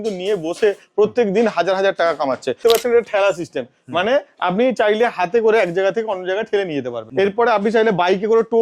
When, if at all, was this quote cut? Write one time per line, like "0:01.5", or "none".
0:02.6
0:07.0